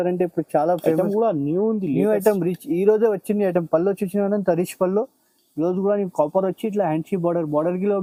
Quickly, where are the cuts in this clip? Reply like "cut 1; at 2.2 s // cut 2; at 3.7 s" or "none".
none